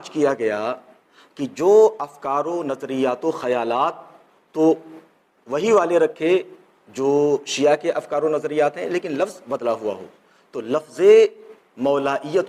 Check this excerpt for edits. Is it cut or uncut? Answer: uncut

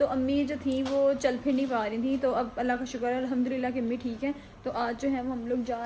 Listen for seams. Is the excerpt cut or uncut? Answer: uncut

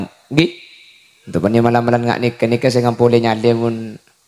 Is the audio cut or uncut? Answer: uncut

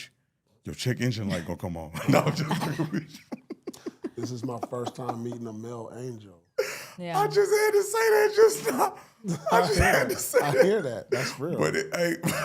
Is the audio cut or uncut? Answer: uncut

